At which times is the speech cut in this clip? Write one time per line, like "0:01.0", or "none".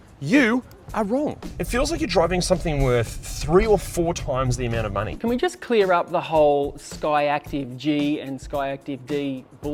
0:01.5
0:05.1